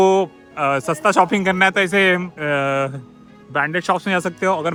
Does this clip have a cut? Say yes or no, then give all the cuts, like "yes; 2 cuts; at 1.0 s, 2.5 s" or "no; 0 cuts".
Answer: no; 0 cuts